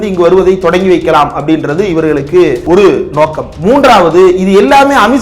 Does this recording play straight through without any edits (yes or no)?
no